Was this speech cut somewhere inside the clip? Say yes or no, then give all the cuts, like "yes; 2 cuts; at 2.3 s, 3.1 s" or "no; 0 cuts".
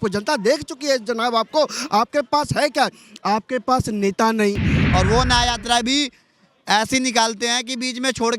yes; 1 cut; at 4.8 s